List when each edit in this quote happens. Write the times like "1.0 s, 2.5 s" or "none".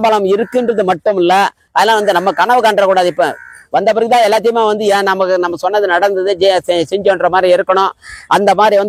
1.6 s